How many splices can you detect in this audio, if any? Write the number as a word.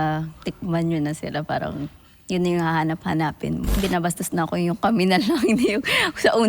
one